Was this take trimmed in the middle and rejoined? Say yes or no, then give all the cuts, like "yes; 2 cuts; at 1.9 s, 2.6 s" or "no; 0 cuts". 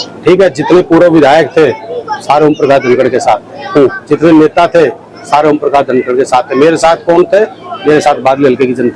no; 0 cuts